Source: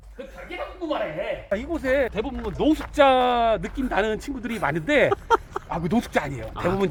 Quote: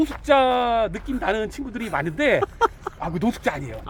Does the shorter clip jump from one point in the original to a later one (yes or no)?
no